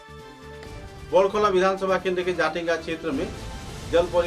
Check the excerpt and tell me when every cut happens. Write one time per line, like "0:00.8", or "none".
0:01.0